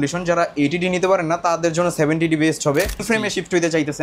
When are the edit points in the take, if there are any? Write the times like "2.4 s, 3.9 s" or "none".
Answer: 3.0 s